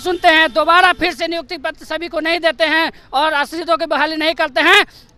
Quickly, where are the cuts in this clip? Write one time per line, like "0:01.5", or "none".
none